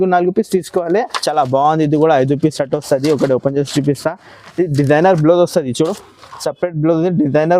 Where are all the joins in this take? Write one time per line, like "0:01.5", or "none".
0:01.2